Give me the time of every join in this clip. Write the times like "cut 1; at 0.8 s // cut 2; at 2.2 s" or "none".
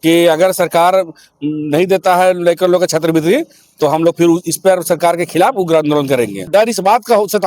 cut 1; at 6.5 s

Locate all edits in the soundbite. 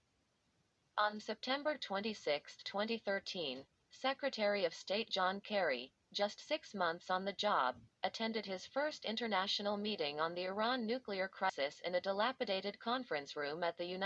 cut 1; at 11.5 s

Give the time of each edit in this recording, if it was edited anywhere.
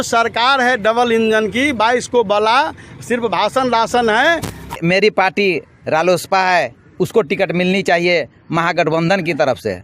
cut 1; at 4.8 s

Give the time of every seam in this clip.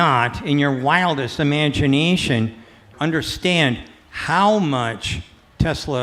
cut 1; at 2.9 s

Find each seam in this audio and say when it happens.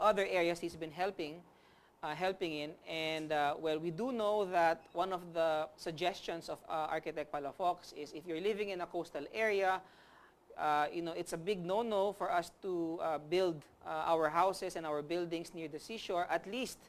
cut 1; at 6.7 s

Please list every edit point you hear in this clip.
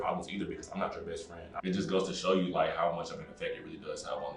cut 1; at 1.5 s

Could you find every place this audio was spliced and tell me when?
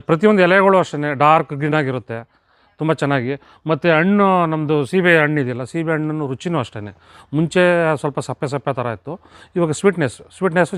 none

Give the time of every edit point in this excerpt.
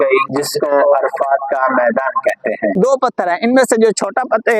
cut 1; at 2.7 s

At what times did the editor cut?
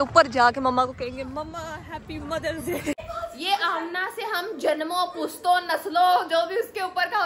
cut 1; at 3.1 s

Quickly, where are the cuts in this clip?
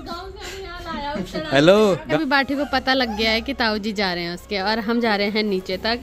cut 1; at 2.1 s

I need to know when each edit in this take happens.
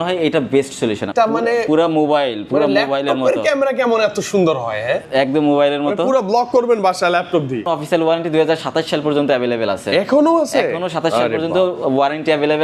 cut 1; at 1.1 s // cut 2; at 7.7 s

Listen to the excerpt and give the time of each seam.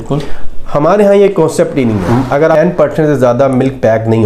cut 1; at 2.6 s

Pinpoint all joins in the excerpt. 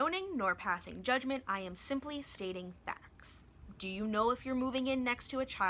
cut 1; at 3.6 s

